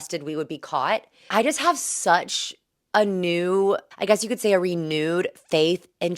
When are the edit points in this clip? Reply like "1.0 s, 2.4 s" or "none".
1.2 s, 3.9 s